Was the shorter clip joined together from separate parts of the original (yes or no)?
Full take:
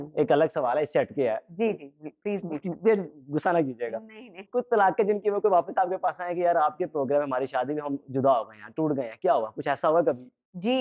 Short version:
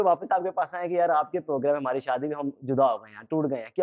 no